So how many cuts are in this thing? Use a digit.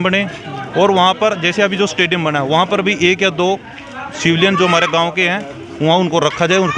0